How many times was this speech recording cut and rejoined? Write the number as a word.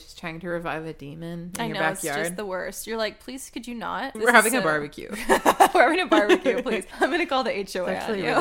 two